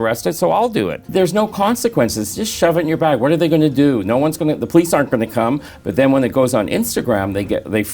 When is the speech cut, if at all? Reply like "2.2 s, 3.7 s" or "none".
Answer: 1.0 s, 5.7 s